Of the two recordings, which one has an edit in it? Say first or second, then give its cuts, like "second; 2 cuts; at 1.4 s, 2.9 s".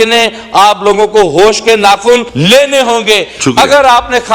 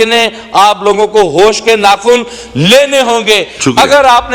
first; 1 cut; at 2.3 s